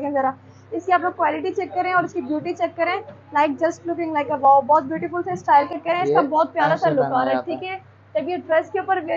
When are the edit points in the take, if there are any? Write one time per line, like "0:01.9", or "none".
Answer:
0:05.7